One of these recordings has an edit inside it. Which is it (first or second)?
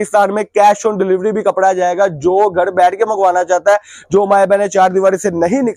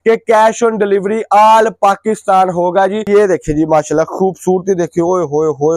second